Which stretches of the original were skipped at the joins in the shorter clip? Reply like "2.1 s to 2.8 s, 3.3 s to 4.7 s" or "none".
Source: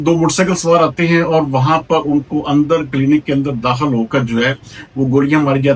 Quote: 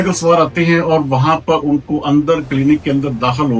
none